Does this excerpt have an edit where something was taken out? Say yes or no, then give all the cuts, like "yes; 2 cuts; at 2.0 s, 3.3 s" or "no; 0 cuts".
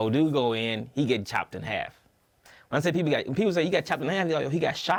no; 0 cuts